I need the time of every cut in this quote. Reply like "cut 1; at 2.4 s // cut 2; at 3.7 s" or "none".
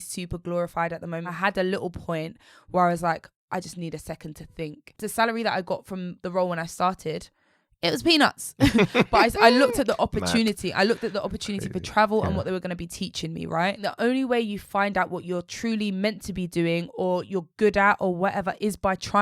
cut 1; at 1.3 s // cut 2; at 4.8 s // cut 3; at 13.8 s